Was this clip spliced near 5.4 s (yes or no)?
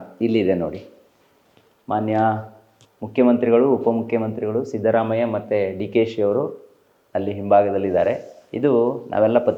no